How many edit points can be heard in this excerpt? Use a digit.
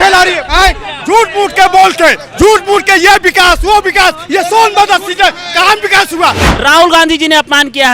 1